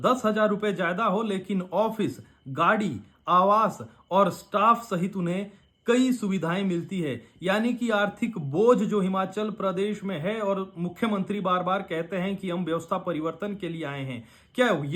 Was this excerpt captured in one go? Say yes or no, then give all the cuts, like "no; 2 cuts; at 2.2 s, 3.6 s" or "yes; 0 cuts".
yes; 0 cuts